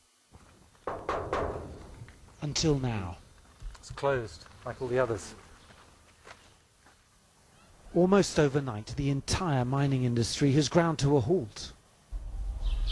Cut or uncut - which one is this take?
cut